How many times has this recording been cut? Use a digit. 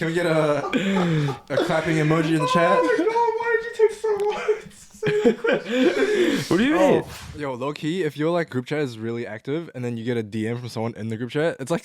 2